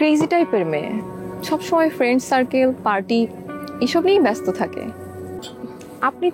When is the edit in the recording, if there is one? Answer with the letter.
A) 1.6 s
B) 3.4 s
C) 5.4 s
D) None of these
C